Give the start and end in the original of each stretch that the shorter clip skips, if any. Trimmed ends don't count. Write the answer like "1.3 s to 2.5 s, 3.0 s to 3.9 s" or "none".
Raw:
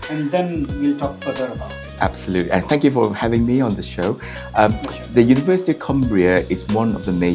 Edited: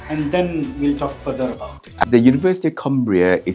2.0 s to 5.1 s